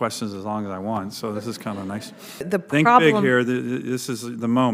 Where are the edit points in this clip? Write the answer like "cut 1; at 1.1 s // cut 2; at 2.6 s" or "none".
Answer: cut 1; at 2.5 s